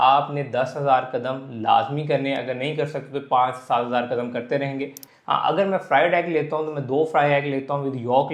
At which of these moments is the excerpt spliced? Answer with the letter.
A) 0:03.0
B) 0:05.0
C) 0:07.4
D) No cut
B